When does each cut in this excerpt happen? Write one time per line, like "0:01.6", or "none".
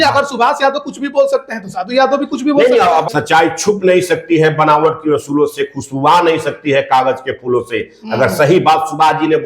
0:03.1